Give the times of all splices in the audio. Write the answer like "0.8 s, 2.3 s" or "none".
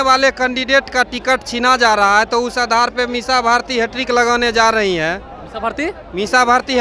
none